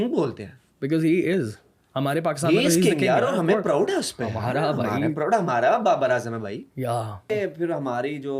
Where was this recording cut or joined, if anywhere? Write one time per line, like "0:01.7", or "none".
0:07.3